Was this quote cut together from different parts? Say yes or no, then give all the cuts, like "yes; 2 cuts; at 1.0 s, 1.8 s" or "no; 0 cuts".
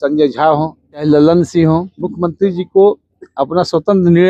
yes; 2 cuts; at 1.0 s, 2.0 s